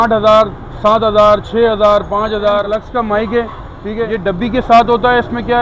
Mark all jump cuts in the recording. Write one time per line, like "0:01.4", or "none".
0:02.8
0:04.1